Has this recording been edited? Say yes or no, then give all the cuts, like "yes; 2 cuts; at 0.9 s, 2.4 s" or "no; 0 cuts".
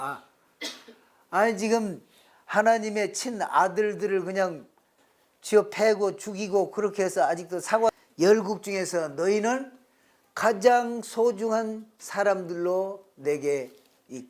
yes; 1 cut; at 7.9 s